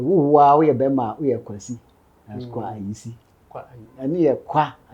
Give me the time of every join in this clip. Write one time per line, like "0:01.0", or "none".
0:03.8